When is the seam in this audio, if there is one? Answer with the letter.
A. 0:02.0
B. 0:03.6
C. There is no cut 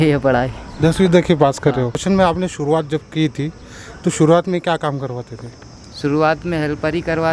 A